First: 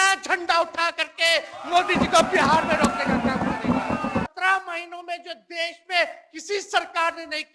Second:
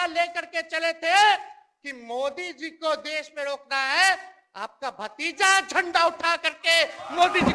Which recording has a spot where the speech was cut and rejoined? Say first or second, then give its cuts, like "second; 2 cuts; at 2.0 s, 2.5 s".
first; 1 cut; at 4.3 s